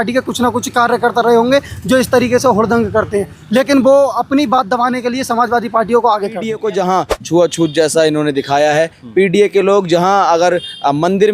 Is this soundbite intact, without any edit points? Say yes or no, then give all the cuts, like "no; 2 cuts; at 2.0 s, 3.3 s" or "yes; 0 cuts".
no; 1 cut; at 6.5 s